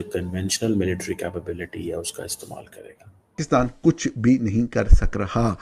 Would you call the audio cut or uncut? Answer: cut